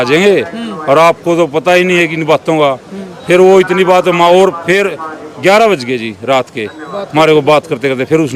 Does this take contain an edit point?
no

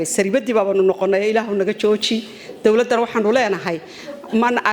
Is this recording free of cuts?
yes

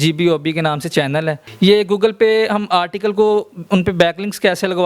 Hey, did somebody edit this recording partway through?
yes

